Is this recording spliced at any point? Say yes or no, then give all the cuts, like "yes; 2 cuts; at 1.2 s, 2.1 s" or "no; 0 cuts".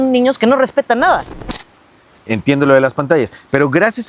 yes; 1 cut; at 1.3 s